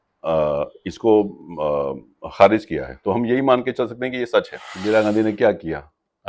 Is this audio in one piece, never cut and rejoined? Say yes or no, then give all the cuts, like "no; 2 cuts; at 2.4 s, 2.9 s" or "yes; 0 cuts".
no; 1 cut; at 4.6 s